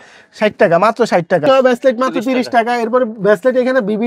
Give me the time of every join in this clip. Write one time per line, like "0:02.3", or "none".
0:01.4